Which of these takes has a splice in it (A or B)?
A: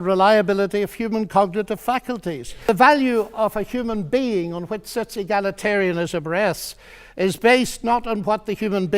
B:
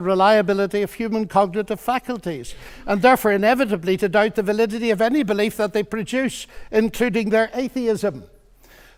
A